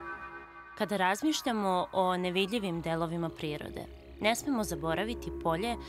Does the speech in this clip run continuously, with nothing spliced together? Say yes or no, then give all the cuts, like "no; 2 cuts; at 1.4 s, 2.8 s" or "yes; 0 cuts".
yes; 0 cuts